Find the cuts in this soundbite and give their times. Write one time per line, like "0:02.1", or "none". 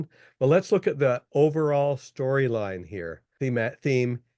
0:03.2